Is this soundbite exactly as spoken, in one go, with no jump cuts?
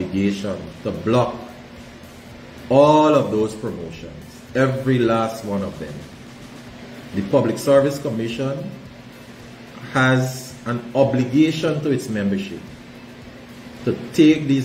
yes; 0 cuts

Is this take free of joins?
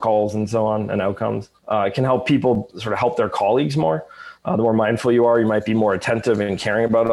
no; 2 cuts; at 1.5 s, 2.8 s

